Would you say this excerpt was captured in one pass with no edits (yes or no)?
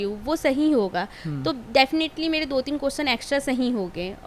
yes